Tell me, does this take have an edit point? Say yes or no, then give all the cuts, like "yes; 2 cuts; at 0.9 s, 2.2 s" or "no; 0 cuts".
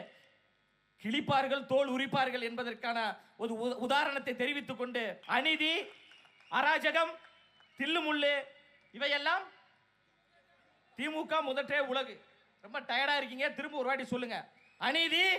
yes; 1 cut; at 5.2 s